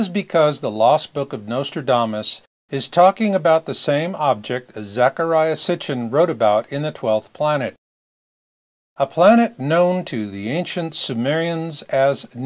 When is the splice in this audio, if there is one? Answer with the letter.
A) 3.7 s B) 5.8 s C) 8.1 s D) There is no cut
B